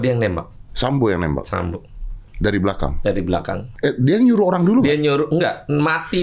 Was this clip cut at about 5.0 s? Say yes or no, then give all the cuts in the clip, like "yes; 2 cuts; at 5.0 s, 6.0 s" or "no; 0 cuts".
no; 2 cuts; at 2.3 s, 3.6 s